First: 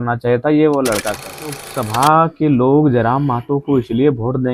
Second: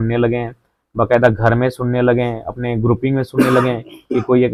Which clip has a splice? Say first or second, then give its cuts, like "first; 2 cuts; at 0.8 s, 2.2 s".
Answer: first; 1 cut; at 1.7 s